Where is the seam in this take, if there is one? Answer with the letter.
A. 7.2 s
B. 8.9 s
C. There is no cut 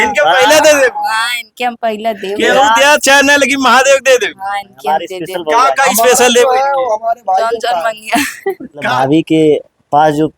B